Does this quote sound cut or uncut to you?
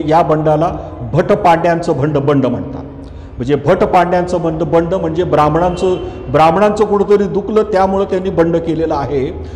uncut